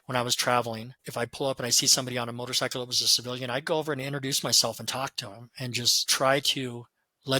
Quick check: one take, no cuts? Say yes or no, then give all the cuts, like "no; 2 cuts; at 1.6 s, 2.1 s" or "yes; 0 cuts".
no; 1 cut; at 1.0 s